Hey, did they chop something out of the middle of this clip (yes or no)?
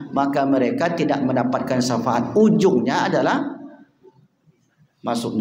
no